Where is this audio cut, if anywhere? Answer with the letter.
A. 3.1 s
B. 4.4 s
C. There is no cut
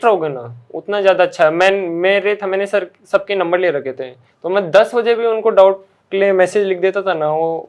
C